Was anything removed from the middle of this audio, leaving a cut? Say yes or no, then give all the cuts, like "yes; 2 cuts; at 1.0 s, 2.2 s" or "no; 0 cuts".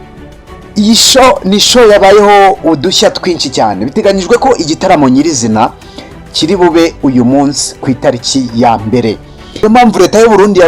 yes; 1 cut; at 9.5 s